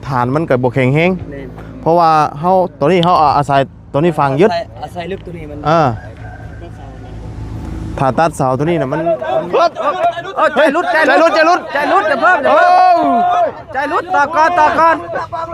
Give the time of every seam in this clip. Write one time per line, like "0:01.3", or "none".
0:09.0